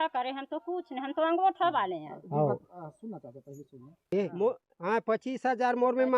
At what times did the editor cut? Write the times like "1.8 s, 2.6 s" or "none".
4.0 s